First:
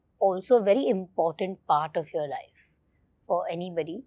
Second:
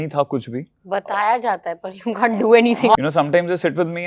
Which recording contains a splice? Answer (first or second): second